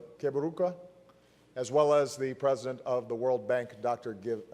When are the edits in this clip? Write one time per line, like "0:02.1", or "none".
0:03.5

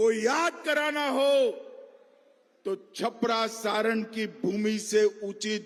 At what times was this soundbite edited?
none

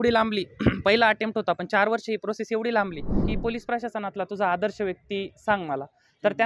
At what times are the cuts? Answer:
0:03.2

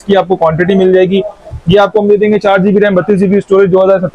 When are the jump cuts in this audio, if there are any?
none

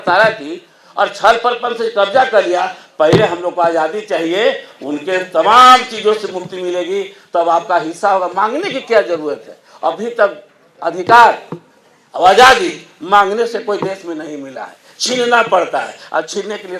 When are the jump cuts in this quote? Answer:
none

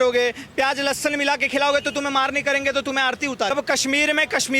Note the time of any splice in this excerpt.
0:03.5

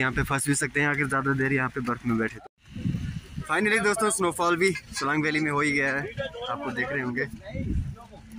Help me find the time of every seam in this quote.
0:02.4

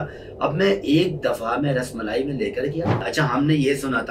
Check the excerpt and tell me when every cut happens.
0:03.0

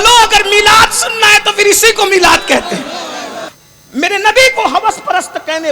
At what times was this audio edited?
0:03.5

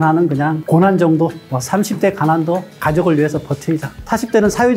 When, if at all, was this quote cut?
0:01.4
0:02.7

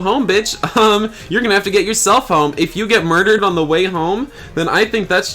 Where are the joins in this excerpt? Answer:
0:03.4

